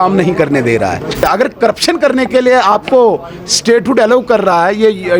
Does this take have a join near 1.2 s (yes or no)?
yes